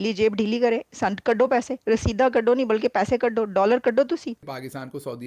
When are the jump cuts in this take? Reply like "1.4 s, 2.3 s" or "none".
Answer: 4.4 s